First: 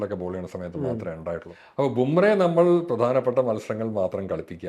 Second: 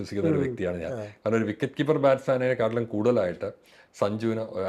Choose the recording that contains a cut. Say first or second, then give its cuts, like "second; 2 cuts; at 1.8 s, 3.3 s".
first; 1 cut; at 1.6 s